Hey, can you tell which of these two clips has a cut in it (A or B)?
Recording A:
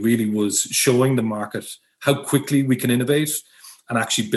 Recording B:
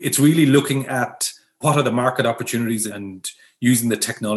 B